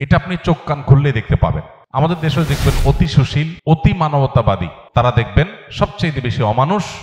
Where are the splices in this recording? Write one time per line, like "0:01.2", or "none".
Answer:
0:01.7
0:03.5
0:04.8